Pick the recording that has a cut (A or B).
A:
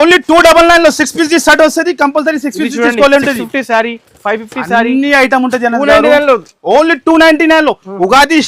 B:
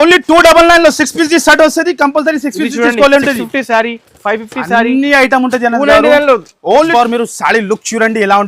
B